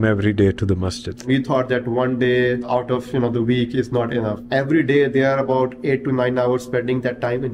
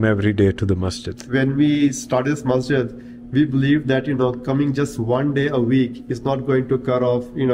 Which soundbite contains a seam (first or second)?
first